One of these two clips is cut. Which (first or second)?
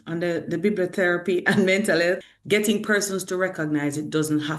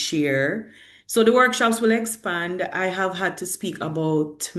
first